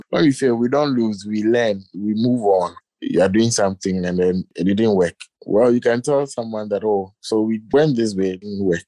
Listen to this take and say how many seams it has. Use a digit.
2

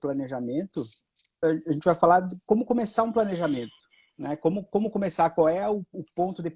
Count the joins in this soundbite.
1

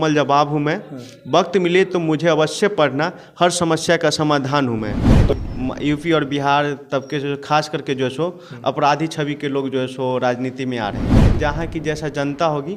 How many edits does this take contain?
2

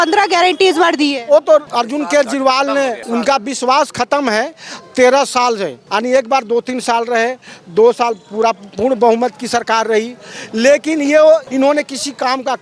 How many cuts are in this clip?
4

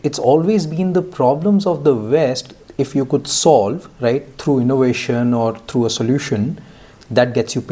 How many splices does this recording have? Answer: 0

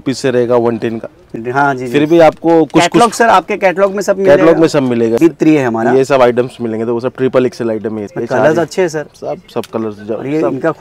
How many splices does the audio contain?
3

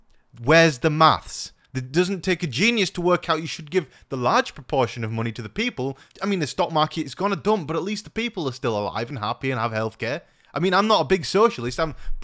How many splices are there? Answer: 2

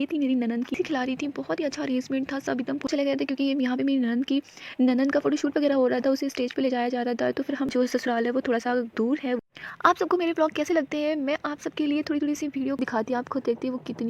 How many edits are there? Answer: 4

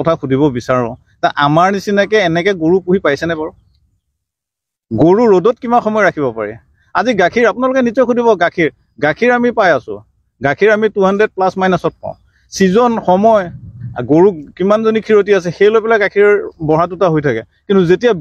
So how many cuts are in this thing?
0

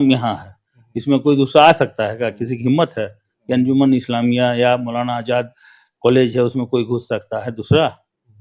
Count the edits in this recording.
0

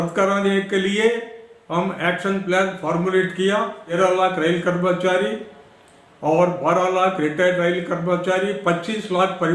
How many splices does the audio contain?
1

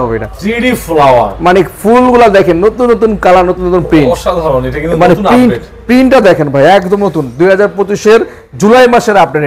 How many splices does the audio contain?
0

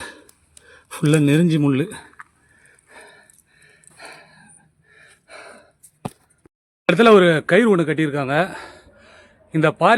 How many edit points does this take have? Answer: 1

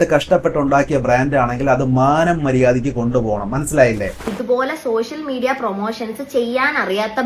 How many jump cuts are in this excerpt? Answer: 1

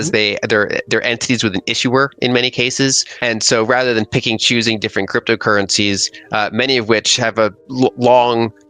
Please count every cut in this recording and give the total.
2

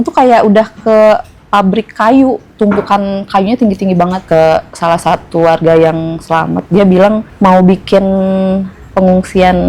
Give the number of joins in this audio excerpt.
3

